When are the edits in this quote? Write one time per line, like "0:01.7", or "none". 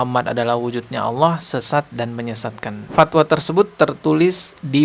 0:02.9